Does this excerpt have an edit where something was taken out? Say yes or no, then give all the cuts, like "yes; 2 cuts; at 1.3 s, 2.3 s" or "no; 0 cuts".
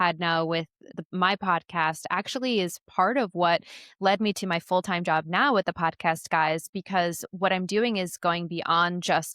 yes; 1 cut; at 1.0 s